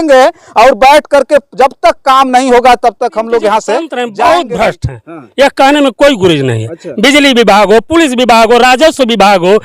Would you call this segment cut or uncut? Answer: cut